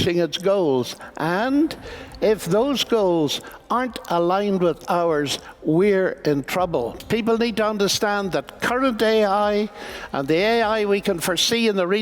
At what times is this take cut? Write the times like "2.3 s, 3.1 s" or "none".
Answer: 6.9 s